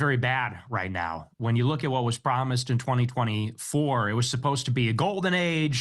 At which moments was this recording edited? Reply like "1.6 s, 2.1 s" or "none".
3.0 s